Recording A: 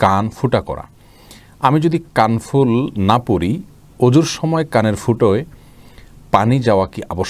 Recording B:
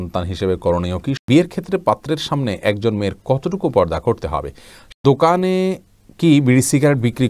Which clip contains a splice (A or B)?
B